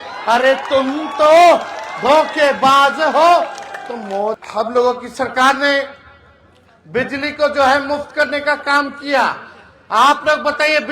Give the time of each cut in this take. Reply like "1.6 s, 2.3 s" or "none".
4.4 s